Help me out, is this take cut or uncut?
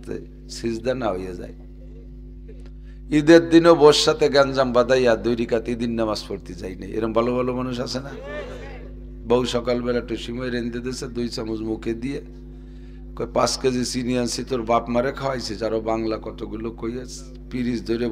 uncut